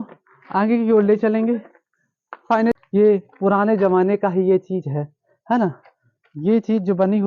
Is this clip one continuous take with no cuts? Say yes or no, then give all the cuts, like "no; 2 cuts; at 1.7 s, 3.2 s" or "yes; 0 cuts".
no; 1 cut; at 2.7 s